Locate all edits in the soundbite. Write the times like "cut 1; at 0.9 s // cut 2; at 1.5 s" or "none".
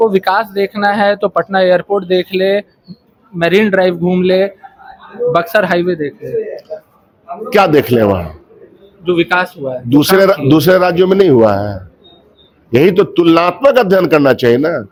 none